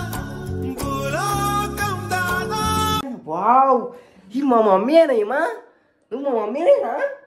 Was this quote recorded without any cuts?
no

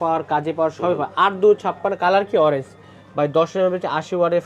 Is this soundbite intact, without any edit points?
yes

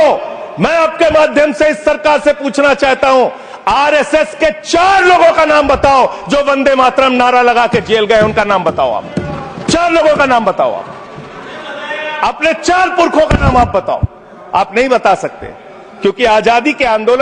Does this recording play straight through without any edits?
yes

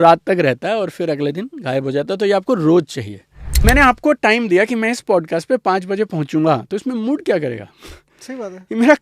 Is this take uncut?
no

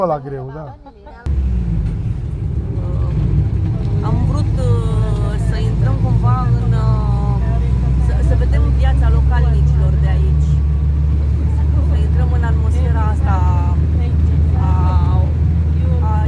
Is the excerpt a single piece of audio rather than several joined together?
no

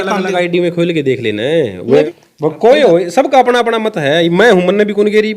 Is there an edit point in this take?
yes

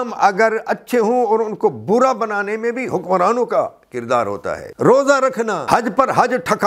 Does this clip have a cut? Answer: yes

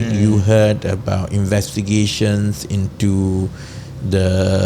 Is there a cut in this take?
no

